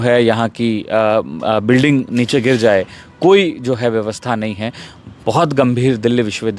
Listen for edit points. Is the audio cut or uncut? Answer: uncut